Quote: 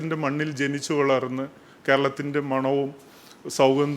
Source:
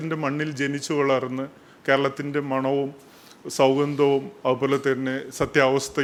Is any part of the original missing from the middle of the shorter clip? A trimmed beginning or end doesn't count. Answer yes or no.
no